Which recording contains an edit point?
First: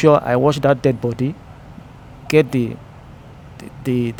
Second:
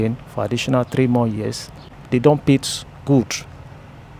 second; 1 cut; at 2.0 s

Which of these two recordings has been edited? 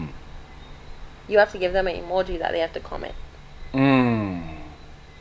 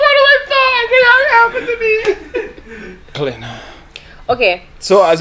second; 1 cut; at 3.2 s

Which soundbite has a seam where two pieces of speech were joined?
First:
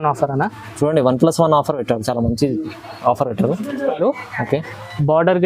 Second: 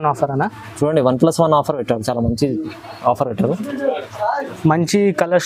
first; 1 cut; at 4.0 s

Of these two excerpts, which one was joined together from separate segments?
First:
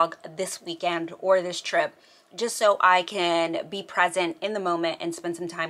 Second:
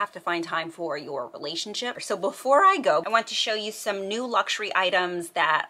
second; 2 cuts; at 2.0 s, 3.0 s

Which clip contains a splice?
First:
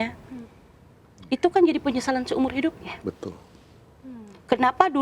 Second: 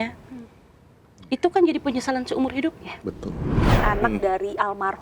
second; 1 cut; at 3.6 s

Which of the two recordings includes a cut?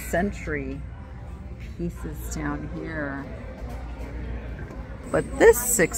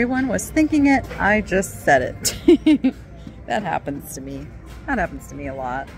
first; 1 cut; at 5.0 s

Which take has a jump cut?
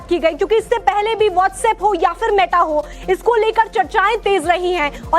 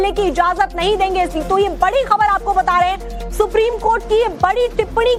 first; 1 cut; at 1.8 s

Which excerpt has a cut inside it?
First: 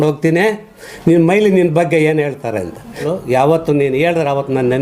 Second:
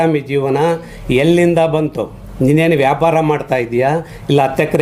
first; 1 cut; at 3.0 s

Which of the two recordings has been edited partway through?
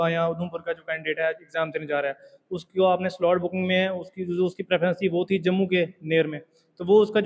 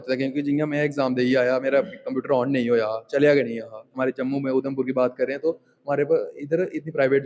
second; 1 cut; at 3.9 s

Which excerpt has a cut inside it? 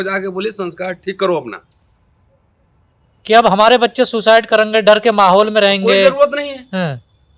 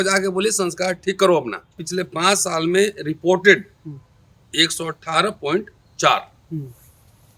second; 1 cut; at 1.8 s

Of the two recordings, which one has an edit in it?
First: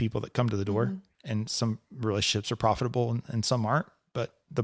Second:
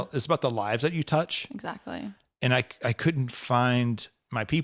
first; 1 cut; at 1.1 s

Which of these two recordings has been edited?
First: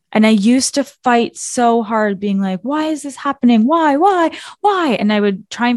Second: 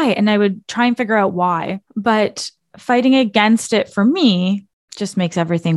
second; 2 cuts; at 1.8 s, 4.8 s

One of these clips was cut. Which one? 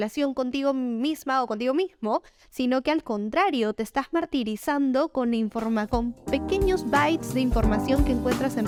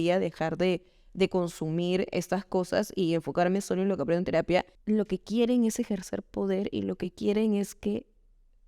second; 1 cut; at 4.7 s

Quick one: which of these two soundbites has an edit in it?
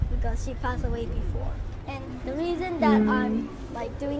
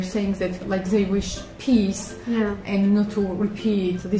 first; 1 cut; at 2.0 s

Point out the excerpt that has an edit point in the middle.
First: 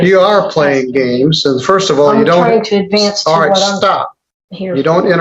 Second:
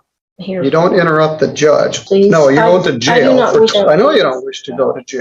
second; 2 cuts; at 2.0 s, 3.7 s

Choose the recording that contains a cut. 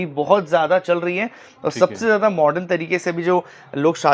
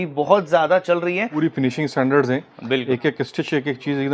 second; 1 cut; at 1.3 s

